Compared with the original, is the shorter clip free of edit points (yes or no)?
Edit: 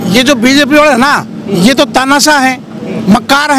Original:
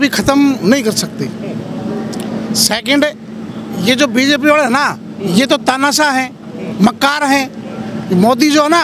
yes